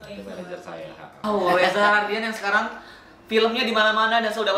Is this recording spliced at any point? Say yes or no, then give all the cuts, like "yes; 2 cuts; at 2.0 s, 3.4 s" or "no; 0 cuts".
no; 0 cuts